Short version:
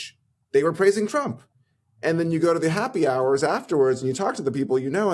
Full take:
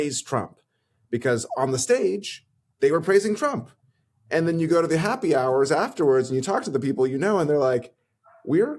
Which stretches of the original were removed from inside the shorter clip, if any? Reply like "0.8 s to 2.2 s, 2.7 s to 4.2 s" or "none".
none

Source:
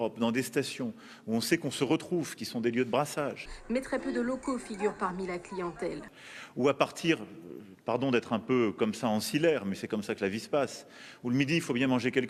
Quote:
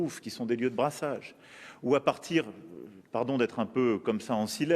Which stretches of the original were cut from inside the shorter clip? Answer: 3.5 s to 6.1 s

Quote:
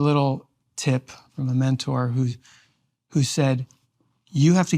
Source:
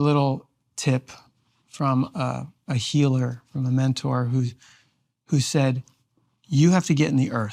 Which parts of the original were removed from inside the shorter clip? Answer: 1.3 s to 3.4 s

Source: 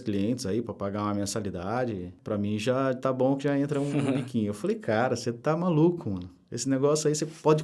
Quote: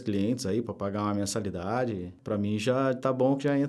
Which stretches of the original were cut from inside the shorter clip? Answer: none

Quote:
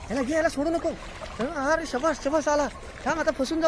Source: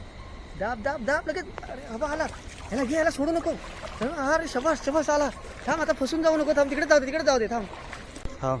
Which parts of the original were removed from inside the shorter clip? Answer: none

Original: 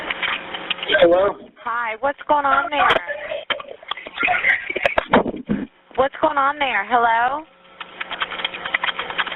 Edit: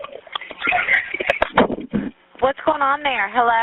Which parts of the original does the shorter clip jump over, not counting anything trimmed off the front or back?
none

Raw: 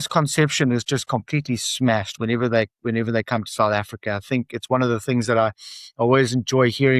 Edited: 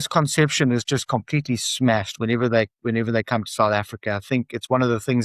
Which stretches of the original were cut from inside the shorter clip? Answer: none

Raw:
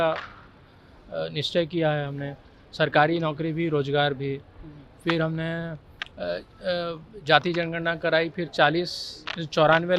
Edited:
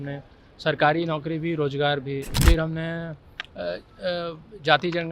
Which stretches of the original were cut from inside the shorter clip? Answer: 4.5 s to 5.0 s

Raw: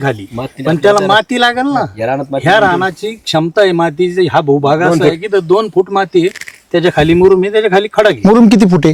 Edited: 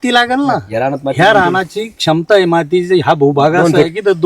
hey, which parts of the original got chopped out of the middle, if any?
none

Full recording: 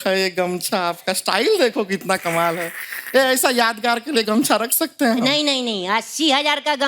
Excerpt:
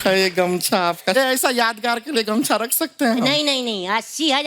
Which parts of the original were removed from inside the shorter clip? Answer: 1.1 s to 3.1 s

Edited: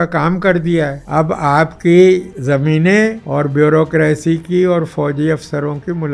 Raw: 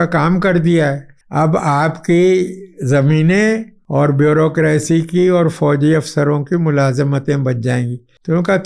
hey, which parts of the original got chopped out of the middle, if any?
1.0 s to 1.2 s, 2.6 s to 2.8 s, 3.7 s to 3.9 s

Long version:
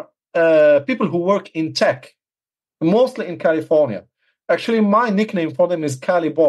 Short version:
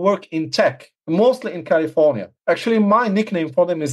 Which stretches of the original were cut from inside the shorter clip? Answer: 2.1 s to 2.6 s, 4.0 s to 4.3 s

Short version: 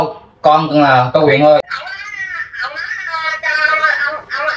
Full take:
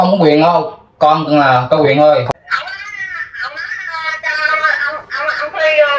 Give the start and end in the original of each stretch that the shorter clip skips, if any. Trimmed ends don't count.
2.2 s to 2.4 s

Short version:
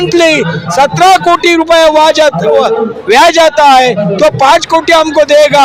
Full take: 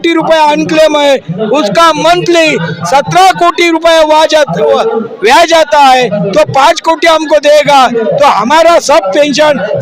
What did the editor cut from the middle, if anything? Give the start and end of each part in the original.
none

